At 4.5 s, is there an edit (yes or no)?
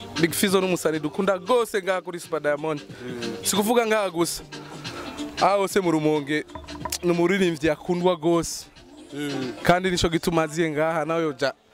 no